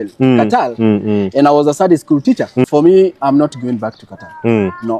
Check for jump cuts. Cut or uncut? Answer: cut